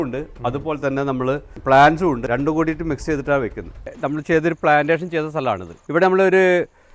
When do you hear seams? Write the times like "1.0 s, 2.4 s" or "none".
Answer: 1.5 s, 2.2 s, 3.8 s, 5.7 s

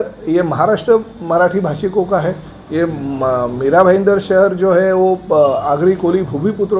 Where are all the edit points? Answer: none

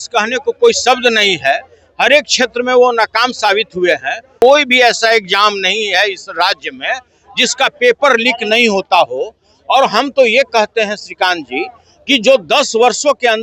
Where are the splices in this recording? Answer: 4.3 s

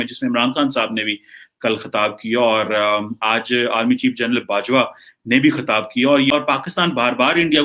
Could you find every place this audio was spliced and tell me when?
6.3 s

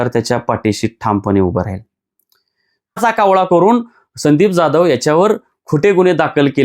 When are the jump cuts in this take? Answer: 3.0 s

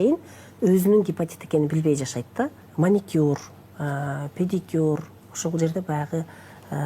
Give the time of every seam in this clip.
2.6 s

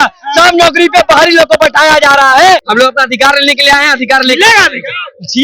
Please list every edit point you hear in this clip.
2.7 s

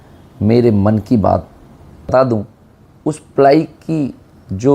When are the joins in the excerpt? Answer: 1.6 s

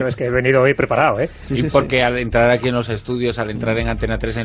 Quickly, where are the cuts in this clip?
3.0 s

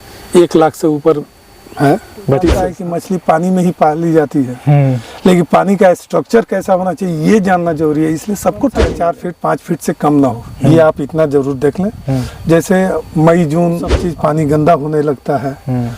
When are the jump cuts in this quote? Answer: 2.7 s, 8.9 s, 14.0 s

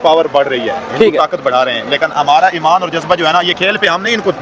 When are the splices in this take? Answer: none

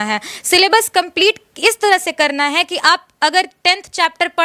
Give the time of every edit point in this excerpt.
none

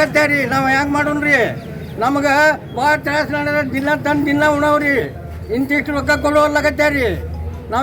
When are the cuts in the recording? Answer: none

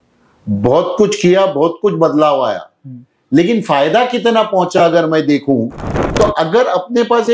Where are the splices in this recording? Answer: 6.0 s

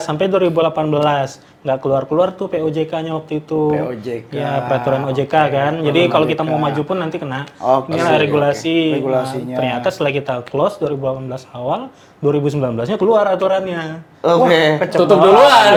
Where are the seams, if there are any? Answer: none

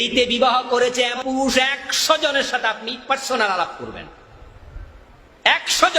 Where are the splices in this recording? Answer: 1.2 s

